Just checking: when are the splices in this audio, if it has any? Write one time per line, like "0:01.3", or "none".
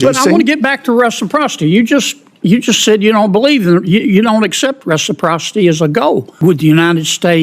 0:06.3